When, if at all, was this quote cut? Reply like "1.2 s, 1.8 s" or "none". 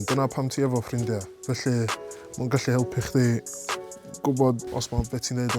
4.7 s